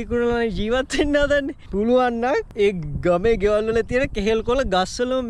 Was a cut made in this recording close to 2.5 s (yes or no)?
yes